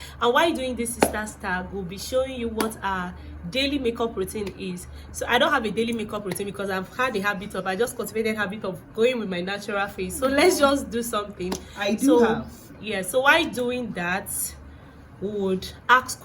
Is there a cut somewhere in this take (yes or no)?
no